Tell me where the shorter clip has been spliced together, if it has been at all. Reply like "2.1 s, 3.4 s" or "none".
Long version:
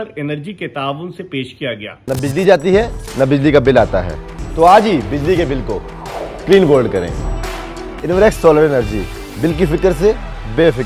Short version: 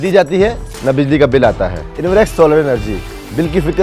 1.9 s